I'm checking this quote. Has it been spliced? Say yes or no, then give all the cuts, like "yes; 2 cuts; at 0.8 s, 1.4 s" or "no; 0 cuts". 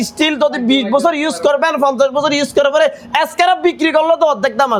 no; 0 cuts